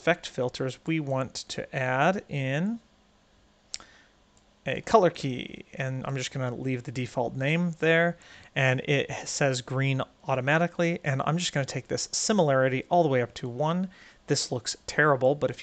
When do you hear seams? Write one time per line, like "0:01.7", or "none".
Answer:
none